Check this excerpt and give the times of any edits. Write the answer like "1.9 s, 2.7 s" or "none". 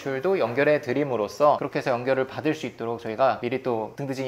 1.6 s